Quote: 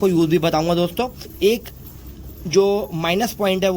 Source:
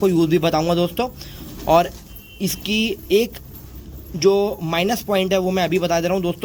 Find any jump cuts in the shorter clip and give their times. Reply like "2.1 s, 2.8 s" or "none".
1.3 s